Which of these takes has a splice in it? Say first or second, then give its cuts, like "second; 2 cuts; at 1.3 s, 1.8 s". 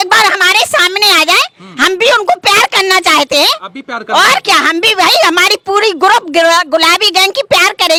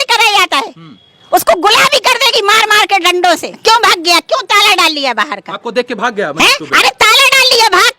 second; 1 cut; at 3.5 s